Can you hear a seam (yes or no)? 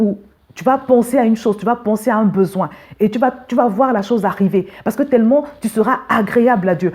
no